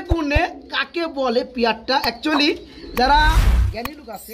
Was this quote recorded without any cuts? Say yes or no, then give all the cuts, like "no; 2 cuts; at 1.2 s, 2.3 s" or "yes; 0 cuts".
yes; 0 cuts